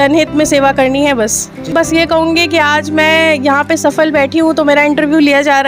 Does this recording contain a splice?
yes; 1 cut; at 1.7 s

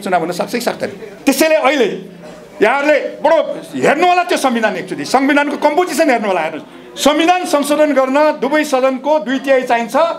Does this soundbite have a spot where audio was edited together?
yes; 1 cut; at 1.1 s

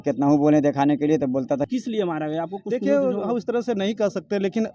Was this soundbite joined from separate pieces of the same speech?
yes; 1 cut; at 1.7 s

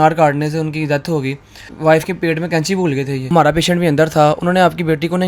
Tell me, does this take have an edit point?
yes; 2 cuts; at 1.7 s, 3.3 s

